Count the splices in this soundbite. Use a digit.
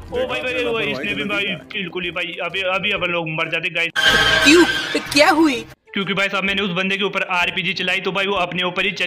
1